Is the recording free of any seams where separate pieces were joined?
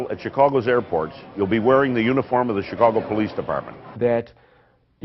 yes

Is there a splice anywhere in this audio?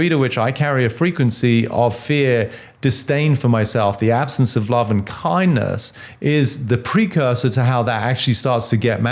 no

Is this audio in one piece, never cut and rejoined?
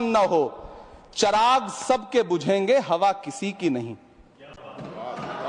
yes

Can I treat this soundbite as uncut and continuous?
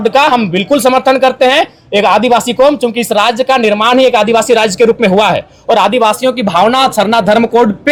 yes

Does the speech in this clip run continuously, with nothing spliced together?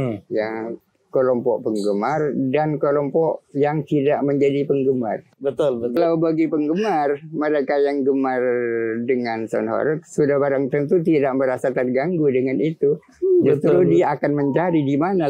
no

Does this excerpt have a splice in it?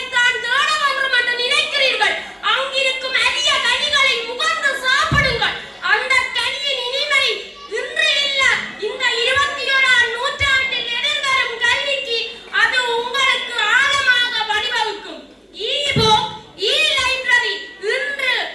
no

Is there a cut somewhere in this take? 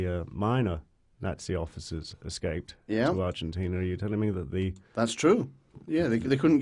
yes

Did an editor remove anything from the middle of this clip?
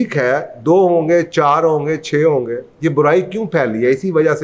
no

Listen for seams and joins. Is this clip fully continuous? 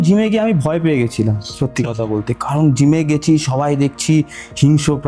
yes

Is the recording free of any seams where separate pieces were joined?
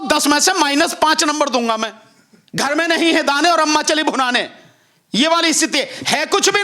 no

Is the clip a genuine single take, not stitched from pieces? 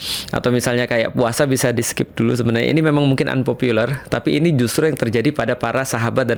yes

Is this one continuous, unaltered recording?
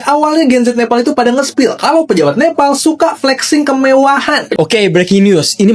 no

